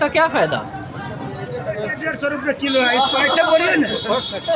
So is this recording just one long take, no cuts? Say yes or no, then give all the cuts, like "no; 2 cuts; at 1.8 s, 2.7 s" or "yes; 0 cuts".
no; 1 cut; at 2.1 s